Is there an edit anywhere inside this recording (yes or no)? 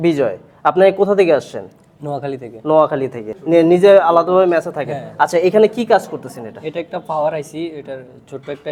yes